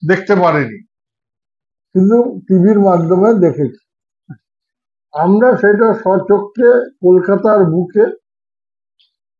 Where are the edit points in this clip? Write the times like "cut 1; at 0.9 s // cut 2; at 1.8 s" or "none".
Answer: none